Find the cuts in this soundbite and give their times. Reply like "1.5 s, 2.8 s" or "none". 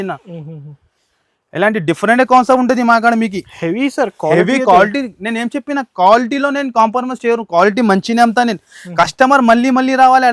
none

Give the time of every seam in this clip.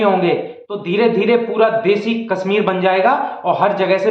none

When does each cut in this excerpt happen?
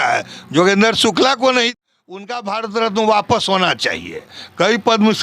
1.8 s

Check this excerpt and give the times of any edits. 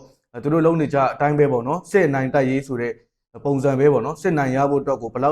none

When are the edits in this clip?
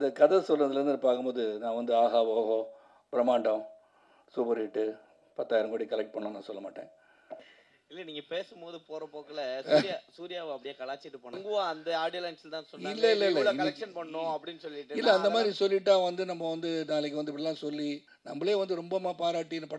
7.5 s, 11.4 s, 18.1 s

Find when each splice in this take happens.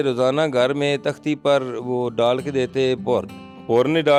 none

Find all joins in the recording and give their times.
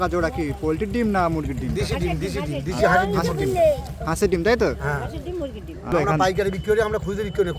5.9 s

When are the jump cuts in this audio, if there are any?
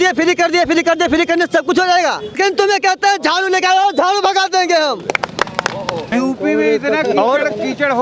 2.3 s, 6.1 s

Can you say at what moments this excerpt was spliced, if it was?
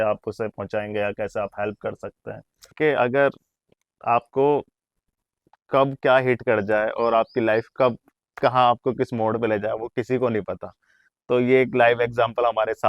2.8 s

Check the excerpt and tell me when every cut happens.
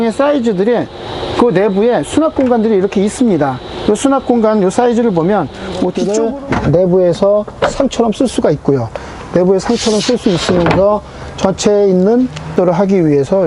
6.0 s, 12.5 s

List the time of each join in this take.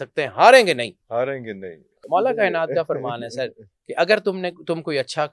1.9 s

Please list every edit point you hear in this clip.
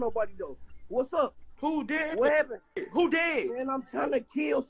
none

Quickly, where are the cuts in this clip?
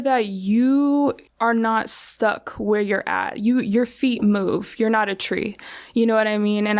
1.3 s

